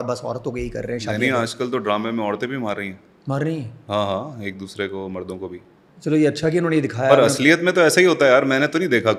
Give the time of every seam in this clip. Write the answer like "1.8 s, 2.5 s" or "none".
none